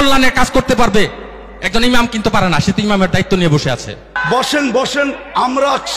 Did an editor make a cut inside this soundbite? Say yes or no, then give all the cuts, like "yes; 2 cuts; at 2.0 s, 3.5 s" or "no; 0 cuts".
yes; 1 cut; at 4.1 s